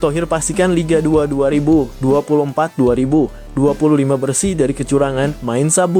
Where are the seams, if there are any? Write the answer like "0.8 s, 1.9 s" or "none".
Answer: none